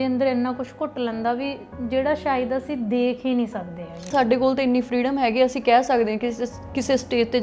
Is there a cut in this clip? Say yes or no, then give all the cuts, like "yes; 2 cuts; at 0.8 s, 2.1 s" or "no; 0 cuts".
yes; 1 cut; at 4.1 s